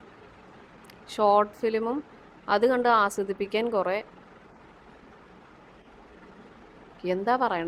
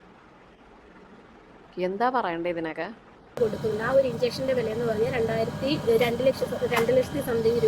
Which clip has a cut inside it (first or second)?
second